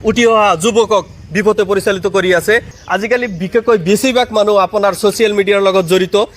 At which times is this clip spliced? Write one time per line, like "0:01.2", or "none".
0:02.7